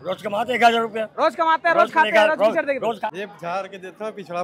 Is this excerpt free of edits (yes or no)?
no